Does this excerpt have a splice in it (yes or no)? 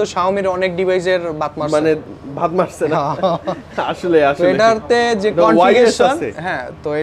no